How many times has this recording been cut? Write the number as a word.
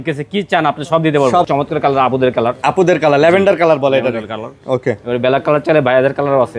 one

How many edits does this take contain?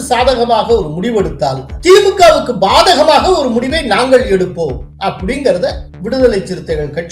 two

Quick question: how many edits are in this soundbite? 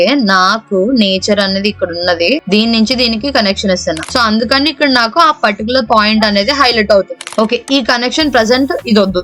two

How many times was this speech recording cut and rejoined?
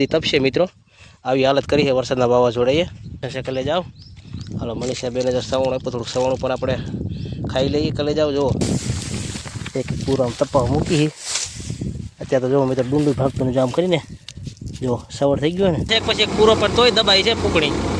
three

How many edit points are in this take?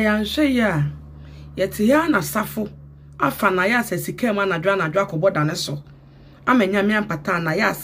zero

